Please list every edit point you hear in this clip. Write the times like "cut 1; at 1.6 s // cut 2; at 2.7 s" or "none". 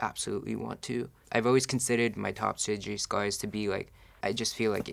cut 1; at 1.2 s // cut 2; at 4.0 s